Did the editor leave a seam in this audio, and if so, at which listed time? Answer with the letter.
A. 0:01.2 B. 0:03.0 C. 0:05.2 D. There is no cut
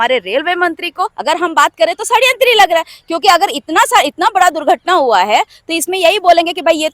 A